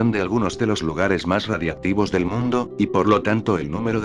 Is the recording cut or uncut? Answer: uncut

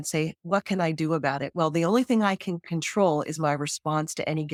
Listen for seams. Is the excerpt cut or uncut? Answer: uncut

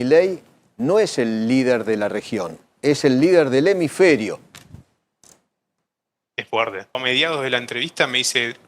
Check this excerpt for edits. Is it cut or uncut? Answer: cut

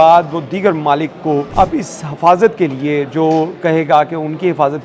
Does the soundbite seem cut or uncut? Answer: cut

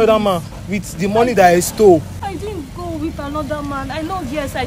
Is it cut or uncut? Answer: uncut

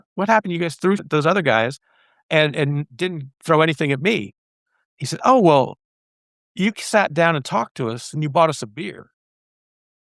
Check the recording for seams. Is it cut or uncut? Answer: uncut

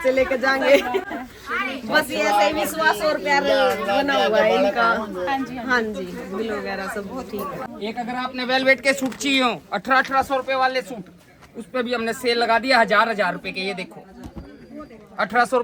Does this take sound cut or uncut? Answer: uncut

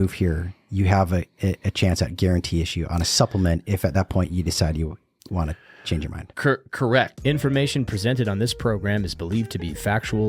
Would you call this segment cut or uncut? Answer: cut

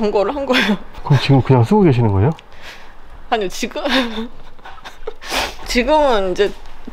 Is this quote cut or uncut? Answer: uncut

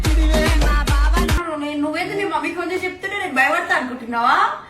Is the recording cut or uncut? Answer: cut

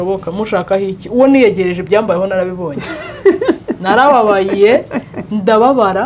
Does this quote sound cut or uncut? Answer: uncut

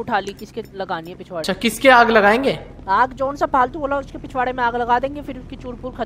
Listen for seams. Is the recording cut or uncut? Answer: cut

